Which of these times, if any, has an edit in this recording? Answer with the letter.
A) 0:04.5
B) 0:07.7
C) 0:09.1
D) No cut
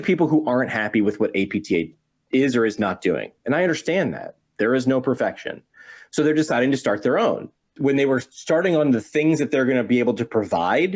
B